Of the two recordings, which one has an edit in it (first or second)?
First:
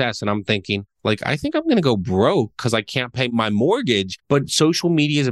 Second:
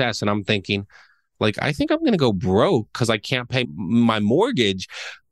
first